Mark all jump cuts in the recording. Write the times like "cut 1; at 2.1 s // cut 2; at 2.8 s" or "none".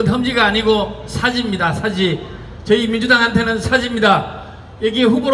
none